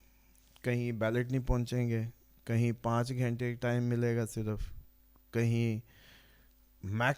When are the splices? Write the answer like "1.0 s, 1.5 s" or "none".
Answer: none